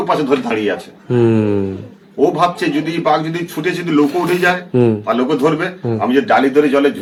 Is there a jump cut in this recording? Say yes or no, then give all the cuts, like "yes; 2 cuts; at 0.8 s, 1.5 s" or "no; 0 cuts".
no; 0 cuts